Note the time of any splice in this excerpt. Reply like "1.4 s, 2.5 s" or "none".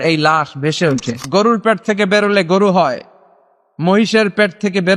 1.1 s